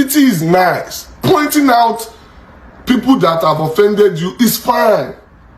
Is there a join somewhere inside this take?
no; 0 cuts

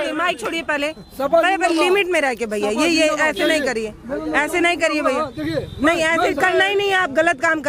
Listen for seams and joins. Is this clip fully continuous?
yes; 0 cuts

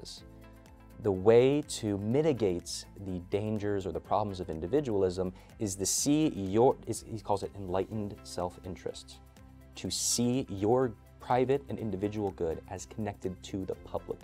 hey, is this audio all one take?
yes; 0 cuts

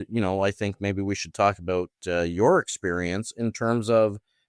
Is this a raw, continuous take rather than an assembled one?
yes; 0 cuts

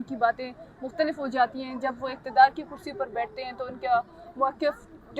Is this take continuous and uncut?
yes; 0 cuts

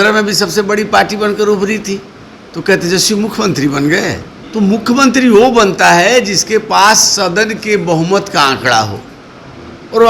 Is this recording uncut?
no; 1 cut; at 4.3 s

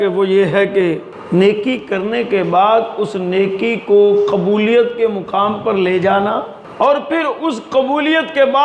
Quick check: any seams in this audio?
yes; 2 cuts; at 1.1 s, 6.6 s

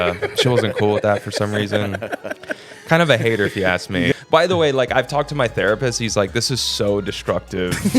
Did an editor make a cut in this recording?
yes; 1 cut; at 4.1 s

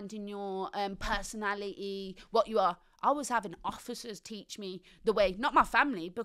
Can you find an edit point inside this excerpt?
no; 0 cuts

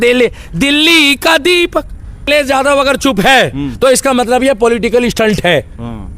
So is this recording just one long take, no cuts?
no; 1 cut; at 2.3 s

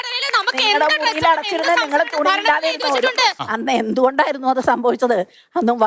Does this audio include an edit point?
yes; 1 cut; at 3.4 s

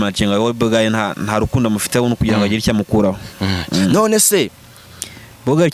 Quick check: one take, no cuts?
no; 1 cut; at 4.6 s

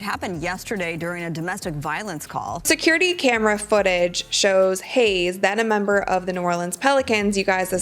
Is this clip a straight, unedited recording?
no; 1 cut; at 2.6 s

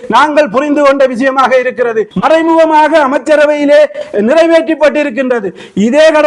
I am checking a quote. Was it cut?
yes; 1 cut; at 2.1 s

